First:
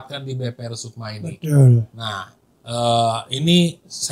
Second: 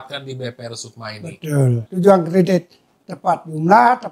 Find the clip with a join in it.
second; 1 cut; at 1.9 s

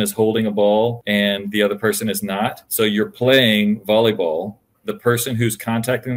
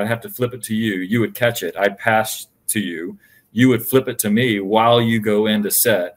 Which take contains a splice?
first; 3 cuts; at 1.0 s, 2.6 s, 4.8 s

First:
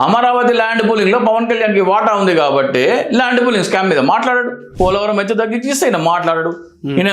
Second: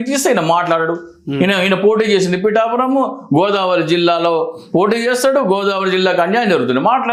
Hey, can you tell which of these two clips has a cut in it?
first; 1 cut; at 4.6 s

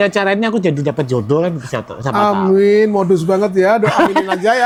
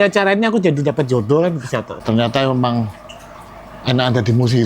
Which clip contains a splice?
second; 1 cut; at 1.9 s

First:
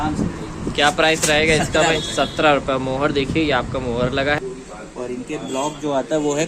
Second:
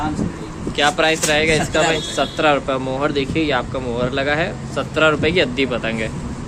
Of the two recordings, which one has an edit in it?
first; 1 cut; at 4.4 s

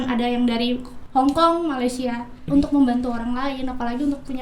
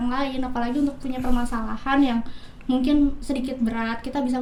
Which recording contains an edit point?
first; 1 cut; at 2.3 s

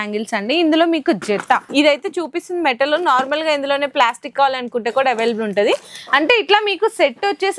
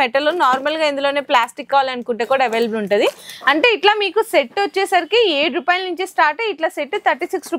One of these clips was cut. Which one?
first; 1 cut; at 1.7 s

